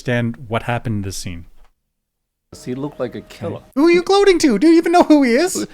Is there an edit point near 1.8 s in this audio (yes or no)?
no